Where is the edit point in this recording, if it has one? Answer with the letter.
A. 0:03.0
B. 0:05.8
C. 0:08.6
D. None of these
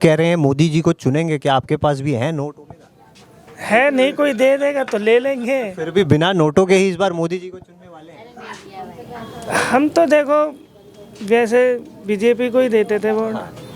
D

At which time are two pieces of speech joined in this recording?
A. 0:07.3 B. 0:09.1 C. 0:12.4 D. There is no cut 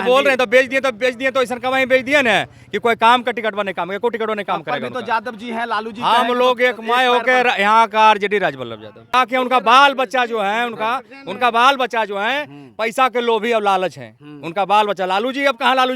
B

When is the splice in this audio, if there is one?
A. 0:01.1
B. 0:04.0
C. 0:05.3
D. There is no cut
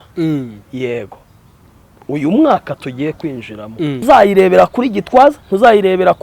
B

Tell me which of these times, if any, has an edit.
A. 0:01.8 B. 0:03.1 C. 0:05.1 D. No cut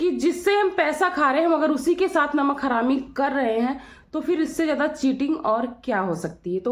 D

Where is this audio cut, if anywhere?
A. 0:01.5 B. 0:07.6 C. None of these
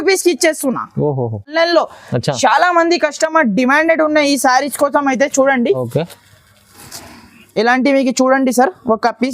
A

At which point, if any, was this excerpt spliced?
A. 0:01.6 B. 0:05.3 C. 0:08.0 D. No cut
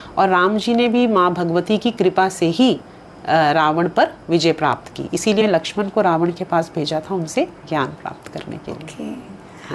B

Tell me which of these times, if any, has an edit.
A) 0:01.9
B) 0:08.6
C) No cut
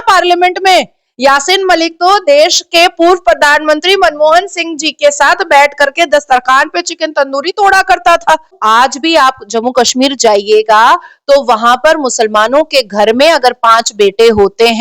B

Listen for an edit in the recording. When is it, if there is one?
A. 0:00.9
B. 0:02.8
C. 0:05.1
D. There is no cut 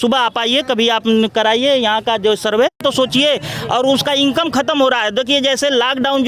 B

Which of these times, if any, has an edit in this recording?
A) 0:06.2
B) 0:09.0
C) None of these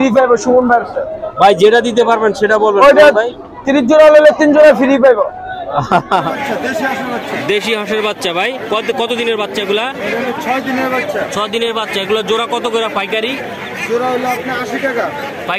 A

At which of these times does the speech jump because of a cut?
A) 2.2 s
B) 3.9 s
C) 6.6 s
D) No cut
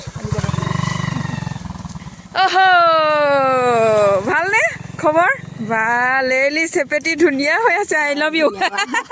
D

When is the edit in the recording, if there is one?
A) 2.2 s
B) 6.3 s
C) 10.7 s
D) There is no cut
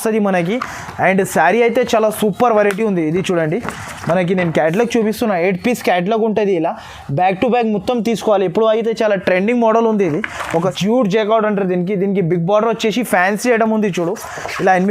C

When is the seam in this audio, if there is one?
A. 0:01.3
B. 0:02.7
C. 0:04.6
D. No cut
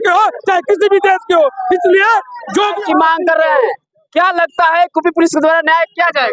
B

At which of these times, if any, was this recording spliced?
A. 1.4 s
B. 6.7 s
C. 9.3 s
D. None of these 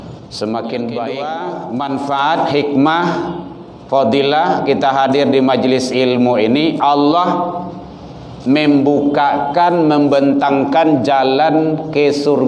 A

